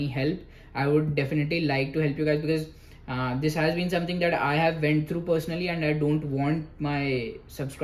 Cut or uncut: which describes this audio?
uncut